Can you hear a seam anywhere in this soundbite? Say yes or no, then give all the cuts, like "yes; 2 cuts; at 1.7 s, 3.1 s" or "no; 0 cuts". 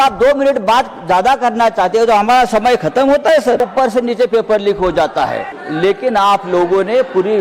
yes; 2 cuts; at 3.6 s, 5.6 s